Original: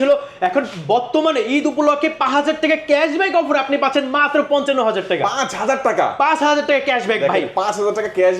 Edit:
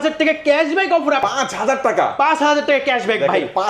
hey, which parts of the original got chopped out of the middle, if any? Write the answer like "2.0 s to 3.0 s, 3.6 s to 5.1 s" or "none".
3.7 s to 5.2 s